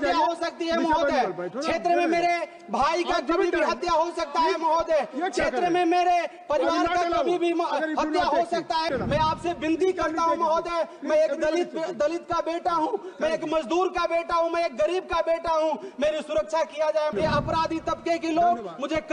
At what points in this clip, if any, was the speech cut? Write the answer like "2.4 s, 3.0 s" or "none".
8.9 s, 17.1 s